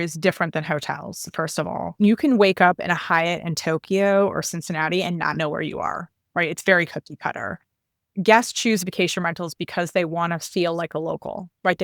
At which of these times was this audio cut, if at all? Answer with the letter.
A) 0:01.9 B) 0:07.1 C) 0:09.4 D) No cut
A